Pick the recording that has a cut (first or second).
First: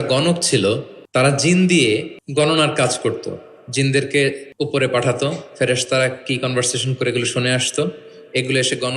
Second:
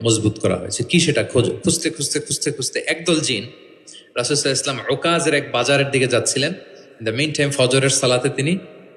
first